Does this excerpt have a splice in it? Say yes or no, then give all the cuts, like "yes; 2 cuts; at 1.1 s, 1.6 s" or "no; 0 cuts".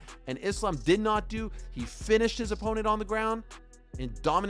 no; 0 cuts